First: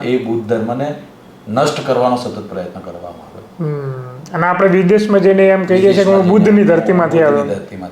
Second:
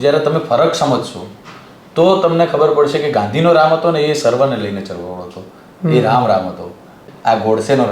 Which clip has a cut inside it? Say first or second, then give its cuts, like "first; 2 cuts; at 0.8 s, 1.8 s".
second; 1 cut; at 7.0 s